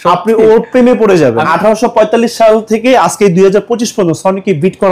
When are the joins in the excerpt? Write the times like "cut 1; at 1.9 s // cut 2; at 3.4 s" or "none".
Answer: cut 1; at 1.5 s